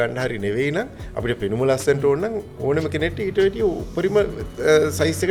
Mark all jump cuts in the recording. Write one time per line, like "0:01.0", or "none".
none